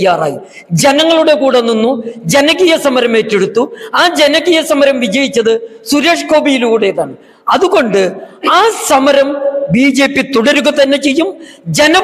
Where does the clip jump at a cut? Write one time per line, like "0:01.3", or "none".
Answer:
none